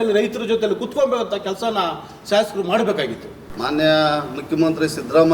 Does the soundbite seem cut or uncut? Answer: cut